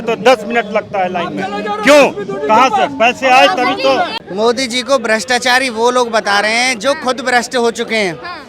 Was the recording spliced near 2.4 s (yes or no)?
no